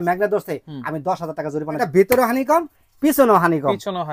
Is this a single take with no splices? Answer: no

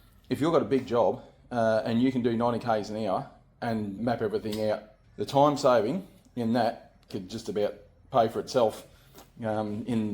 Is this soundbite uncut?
no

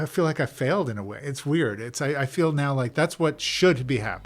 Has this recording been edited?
yes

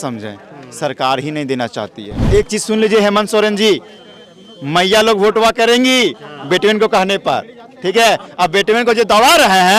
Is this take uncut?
no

